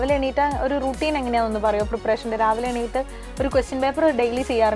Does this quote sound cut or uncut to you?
uncut